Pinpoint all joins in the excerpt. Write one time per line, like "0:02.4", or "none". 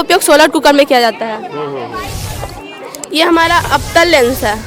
none